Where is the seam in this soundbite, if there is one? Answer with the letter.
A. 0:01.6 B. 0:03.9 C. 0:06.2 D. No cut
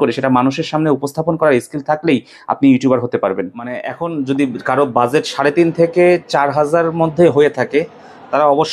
B